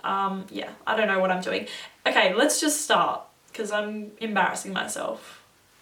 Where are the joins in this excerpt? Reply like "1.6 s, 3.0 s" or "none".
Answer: none